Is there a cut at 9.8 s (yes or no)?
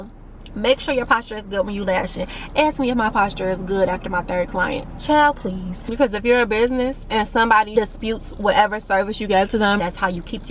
yes